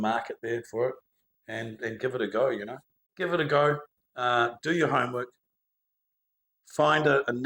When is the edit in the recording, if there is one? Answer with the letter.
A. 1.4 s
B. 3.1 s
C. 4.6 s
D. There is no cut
B